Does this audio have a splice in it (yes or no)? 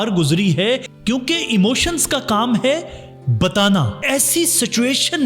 yes